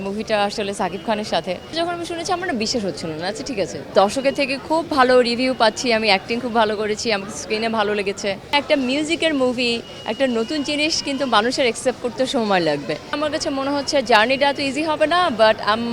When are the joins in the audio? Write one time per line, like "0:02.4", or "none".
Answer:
0:01.7
0:03.9
0:08.5
0:13.2